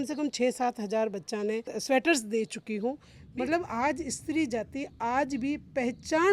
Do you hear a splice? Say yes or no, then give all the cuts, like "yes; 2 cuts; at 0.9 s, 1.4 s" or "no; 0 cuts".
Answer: yes; 2 cuts; at 1.8 s, 3.2 s